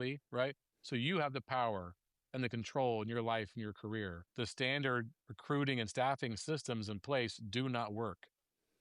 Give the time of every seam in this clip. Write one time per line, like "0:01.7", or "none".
0:04.2